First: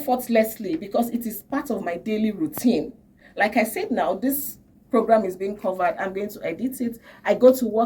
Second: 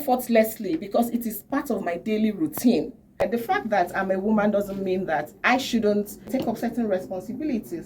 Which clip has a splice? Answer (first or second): second